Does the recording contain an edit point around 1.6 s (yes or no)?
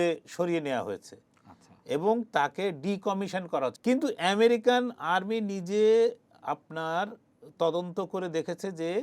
no